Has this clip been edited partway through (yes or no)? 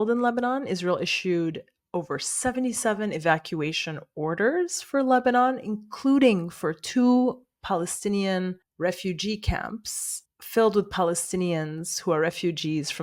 no